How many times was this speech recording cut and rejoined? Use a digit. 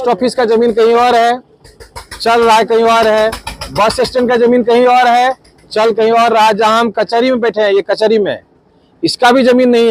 0